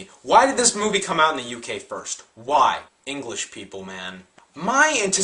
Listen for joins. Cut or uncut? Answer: uncut